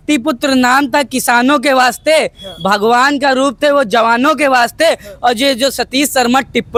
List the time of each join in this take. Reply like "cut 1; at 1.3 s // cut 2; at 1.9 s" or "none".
none